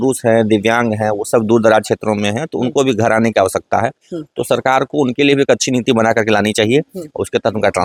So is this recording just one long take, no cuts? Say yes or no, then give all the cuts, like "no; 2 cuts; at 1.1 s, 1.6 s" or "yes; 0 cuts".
yes; 0 cuts